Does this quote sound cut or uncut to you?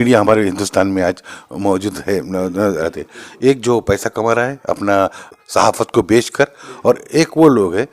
cut